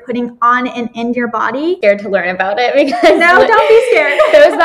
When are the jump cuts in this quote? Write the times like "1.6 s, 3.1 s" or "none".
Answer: 1.8 s

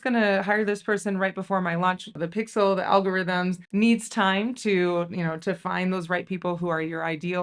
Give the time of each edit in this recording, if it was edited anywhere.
2.2 s

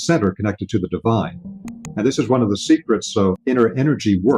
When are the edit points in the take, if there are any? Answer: 1.5 s, 3.4 s

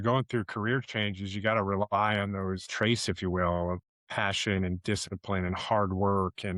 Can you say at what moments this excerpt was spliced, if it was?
2.6 s, 3.9 s

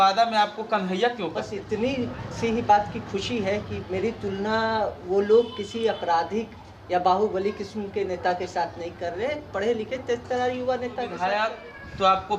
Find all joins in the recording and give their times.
1.6 s, 11.1 s

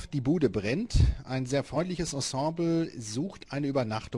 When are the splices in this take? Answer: 1.6 s

